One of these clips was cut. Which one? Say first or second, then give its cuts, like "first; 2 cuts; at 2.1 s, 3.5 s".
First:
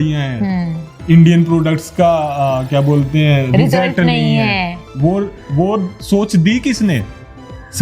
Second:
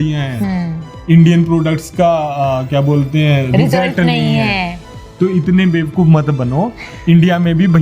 second; 1 cut; at 4.8 s